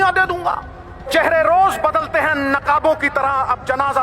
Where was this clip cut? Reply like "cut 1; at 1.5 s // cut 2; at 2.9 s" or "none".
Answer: cut 1; at 1.1 s